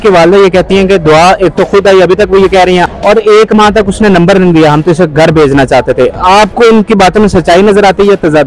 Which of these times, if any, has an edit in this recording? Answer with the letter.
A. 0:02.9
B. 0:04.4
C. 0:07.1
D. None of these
A